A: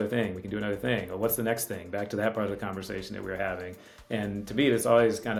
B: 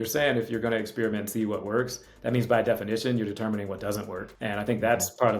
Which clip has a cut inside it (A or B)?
B